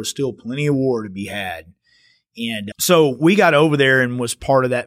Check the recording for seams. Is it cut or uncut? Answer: cut